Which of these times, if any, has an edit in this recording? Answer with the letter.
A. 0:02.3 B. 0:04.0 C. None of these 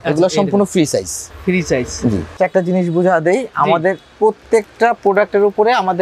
A